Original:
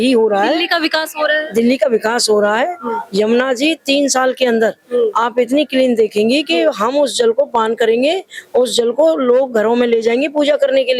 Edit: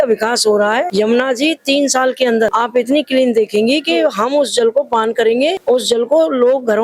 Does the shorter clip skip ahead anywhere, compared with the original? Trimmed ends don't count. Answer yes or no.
yes